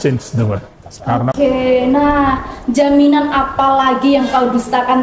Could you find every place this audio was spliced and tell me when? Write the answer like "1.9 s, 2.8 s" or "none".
1.3 s